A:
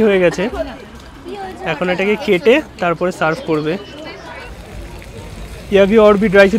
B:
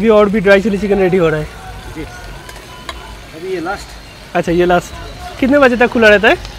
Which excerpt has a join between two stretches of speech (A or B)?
A